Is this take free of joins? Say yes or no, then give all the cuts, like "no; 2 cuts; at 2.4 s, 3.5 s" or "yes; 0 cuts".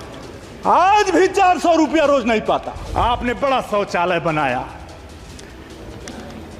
no; 1 cut; at 2.8 s